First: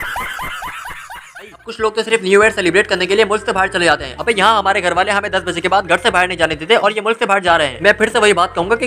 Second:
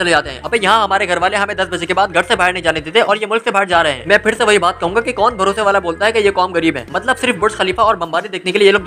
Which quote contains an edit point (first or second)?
first